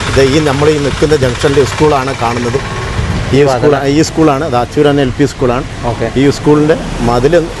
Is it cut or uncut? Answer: uncut